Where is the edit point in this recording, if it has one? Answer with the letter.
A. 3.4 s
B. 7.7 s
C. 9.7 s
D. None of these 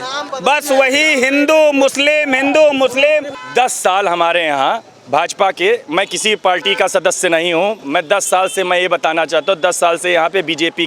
A